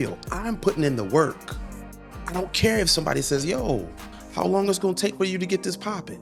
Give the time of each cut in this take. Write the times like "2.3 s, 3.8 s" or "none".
none